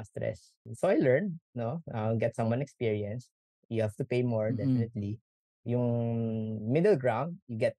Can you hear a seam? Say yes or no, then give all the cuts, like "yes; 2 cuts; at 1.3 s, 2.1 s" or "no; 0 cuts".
no; 0 cuts